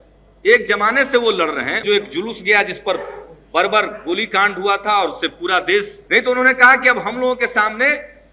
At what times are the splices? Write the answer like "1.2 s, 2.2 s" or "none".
1.8 s, 6.0 s